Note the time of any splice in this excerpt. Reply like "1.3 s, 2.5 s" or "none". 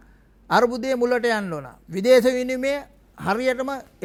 none